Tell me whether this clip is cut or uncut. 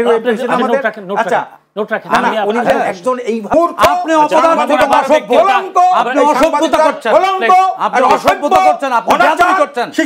cut